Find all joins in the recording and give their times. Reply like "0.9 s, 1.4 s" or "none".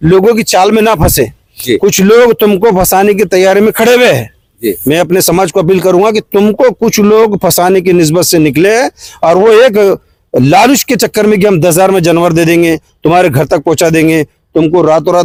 none